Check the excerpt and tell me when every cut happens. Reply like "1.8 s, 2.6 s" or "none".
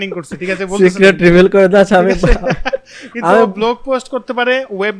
none